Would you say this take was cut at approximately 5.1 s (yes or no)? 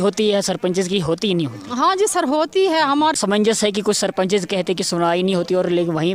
no